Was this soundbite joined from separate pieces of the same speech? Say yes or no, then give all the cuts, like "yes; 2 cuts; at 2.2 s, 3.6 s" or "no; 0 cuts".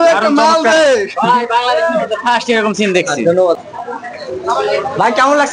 no; 0 cuts